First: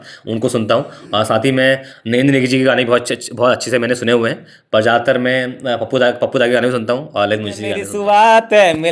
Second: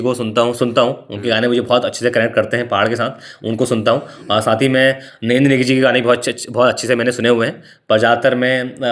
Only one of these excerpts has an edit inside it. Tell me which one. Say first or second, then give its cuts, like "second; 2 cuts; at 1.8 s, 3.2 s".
first; 1 cut; at 7.8 s